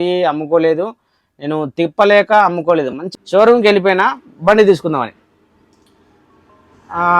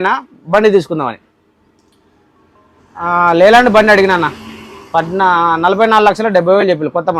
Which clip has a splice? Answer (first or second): first